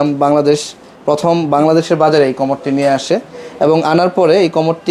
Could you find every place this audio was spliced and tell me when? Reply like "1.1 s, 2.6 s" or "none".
none